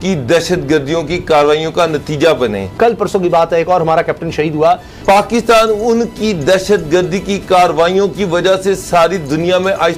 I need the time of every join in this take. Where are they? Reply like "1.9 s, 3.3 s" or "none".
2.7 s, 4.9 s

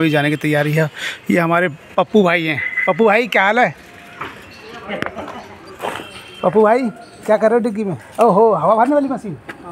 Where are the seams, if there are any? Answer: 2.7 s, 5.0 s

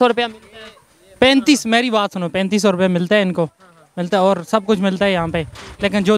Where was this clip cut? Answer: none

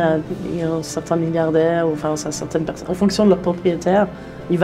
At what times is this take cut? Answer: none

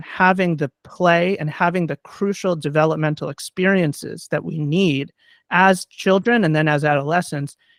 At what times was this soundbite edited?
none

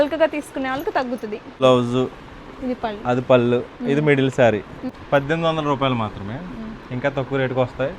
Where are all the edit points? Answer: 1.6 s, 4.7 s

